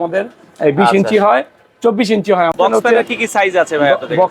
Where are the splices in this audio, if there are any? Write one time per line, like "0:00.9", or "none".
0:02.5